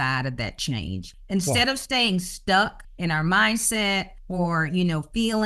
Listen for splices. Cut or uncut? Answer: cut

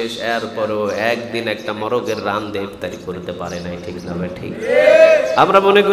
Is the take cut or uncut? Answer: uncut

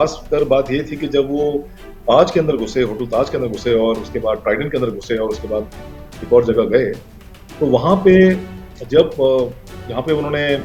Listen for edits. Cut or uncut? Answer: uncut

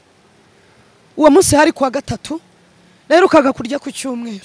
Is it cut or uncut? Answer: uncut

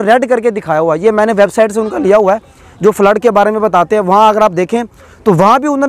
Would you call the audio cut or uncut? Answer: uncut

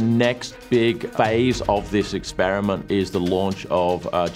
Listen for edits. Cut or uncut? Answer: cut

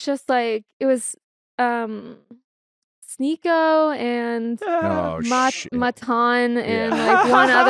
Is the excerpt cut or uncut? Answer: uncut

